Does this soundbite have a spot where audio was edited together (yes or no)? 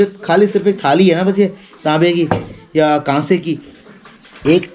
no